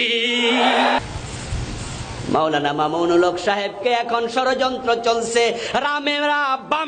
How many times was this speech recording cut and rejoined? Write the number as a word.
one